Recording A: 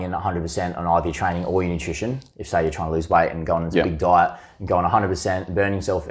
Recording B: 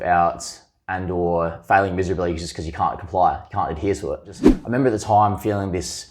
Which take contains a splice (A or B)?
B